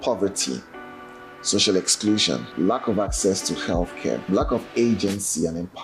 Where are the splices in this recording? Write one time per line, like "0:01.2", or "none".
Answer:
0:02.5
0:04.2